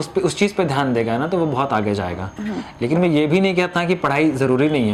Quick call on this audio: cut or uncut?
uncut